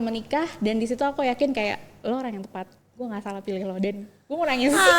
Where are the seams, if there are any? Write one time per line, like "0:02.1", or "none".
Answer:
0:01.9

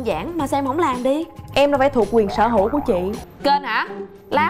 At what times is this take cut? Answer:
0:03.2

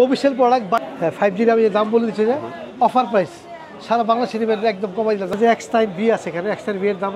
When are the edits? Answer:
0:00.9
0:05.3

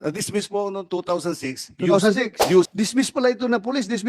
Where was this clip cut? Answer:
0:02.7

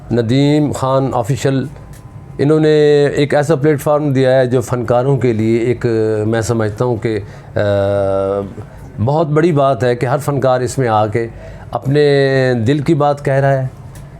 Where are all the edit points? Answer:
none

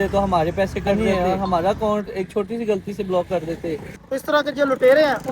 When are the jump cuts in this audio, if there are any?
0:01.0
0:03.9

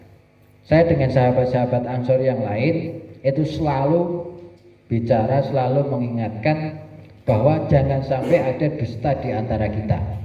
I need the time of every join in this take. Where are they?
none

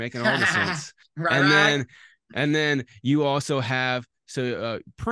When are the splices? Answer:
none

